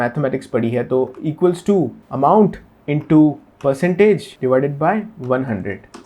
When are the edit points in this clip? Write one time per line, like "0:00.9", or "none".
0:02.0
0:04.3